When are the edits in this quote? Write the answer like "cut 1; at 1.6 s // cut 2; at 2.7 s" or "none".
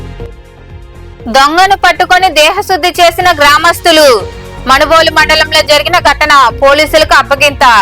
cut 1; at 1.2 s